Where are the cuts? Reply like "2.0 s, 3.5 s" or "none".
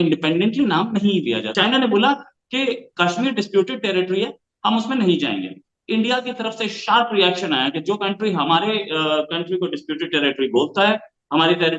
1.5 s